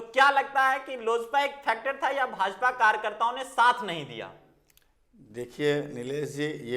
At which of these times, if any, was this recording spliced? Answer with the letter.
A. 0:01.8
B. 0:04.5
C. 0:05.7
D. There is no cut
D